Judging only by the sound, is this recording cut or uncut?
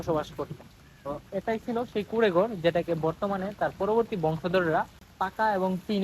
cut